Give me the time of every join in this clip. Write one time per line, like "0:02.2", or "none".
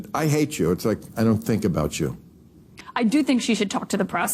0:02.8